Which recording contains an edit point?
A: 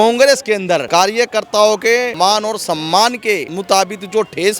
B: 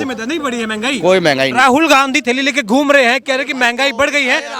A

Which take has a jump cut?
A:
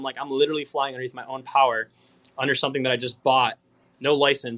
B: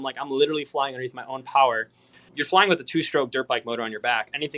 B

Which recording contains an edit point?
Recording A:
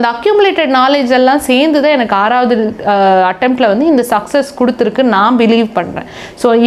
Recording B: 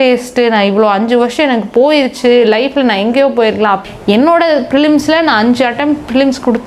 B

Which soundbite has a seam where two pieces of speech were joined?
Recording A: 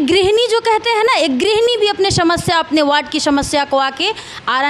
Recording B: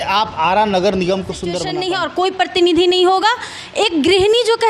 B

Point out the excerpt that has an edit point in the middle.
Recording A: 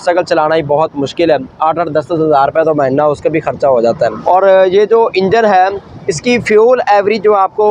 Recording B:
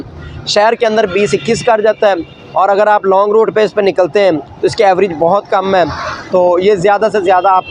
A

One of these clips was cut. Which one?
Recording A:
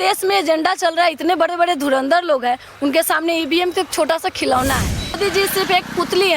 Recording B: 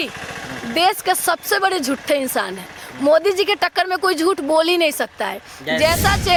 A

